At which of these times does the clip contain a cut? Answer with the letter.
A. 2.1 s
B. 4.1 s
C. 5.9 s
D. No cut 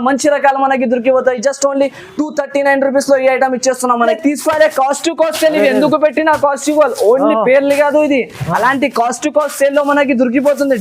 B